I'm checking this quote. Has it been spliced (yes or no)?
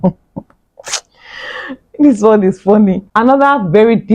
yes